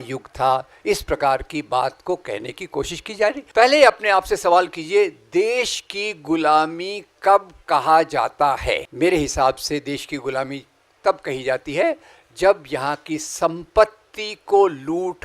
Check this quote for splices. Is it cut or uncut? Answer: cut